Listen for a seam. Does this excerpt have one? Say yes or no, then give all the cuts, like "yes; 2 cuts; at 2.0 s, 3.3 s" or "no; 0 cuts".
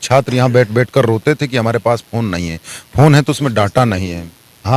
no; 0 cuts